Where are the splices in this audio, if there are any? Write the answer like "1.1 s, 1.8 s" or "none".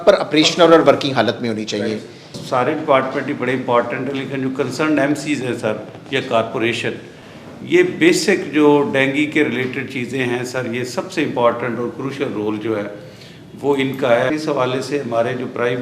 2.4 s, 14.3 s